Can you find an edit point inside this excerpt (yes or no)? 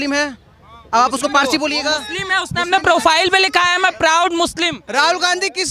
yes